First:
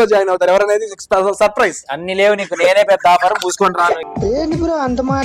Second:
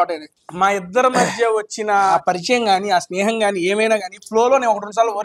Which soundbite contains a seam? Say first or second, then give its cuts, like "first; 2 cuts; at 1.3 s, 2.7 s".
first; 1 cut; at 4.0 s